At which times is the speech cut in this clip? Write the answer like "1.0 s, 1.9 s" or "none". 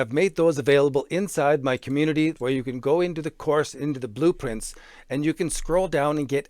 2.4 s